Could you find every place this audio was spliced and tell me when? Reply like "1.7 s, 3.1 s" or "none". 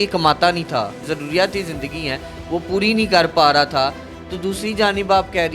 1.1 s